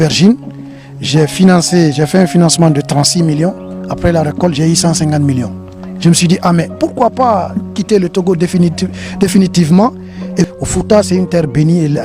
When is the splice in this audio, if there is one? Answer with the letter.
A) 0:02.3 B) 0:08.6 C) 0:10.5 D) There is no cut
C